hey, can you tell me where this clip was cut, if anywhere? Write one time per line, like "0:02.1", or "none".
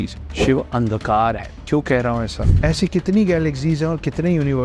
0:02.4